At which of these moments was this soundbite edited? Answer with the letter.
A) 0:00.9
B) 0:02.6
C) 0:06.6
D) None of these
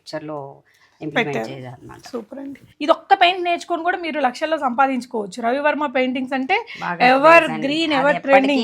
B